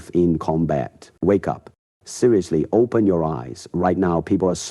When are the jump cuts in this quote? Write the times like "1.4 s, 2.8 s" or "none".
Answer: 1.1 s